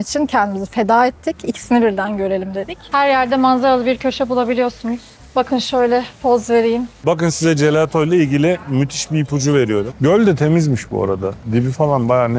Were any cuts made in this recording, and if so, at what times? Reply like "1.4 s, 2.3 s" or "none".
2.9 s, 6.9 s, 9.9 s